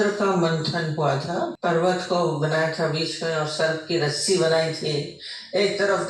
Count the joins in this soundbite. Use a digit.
1